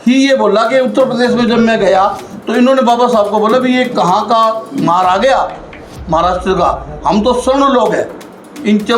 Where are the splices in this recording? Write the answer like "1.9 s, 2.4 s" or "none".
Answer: none